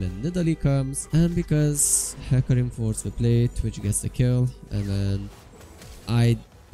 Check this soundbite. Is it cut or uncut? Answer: cut